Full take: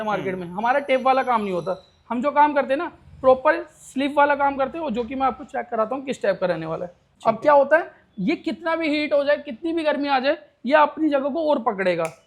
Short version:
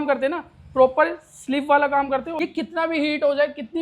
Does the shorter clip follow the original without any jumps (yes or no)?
no